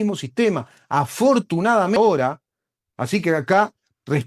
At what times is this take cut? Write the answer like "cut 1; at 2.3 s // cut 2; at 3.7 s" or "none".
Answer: cut 1; at 2.0 s